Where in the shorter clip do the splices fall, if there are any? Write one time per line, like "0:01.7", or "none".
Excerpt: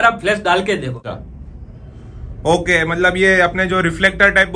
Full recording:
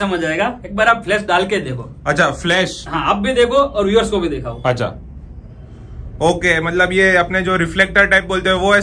0:01.1